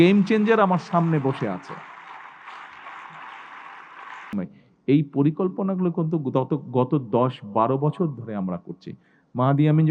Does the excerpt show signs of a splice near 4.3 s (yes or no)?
yes